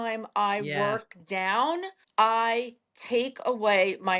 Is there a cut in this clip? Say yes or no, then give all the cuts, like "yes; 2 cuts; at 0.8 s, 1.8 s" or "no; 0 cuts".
yes; 1 cut; at 2.0 s